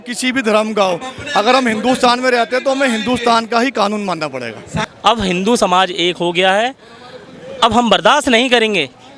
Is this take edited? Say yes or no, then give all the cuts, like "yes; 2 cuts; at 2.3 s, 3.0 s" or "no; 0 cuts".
yes; 1 cut; at 4.9 s